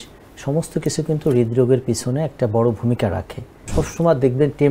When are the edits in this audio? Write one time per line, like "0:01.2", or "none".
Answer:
0:03.7